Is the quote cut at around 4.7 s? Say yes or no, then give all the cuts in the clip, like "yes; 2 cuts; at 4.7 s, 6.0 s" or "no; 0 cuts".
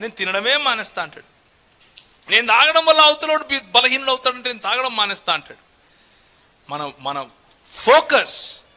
no; 0 cuts